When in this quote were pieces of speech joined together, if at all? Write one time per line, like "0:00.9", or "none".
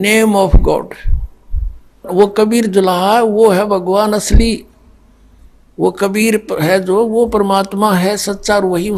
none

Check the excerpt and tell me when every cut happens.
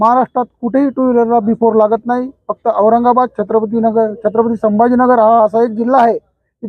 none

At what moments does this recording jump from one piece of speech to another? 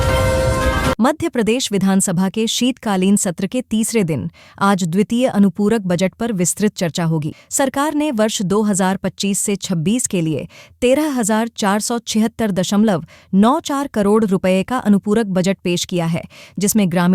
0:01.0

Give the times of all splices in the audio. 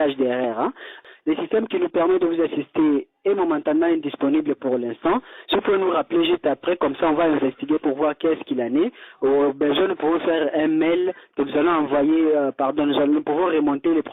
0:01.0

